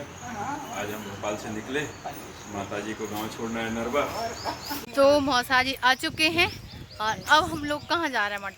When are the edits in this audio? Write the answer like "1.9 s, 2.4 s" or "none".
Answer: 4.8 s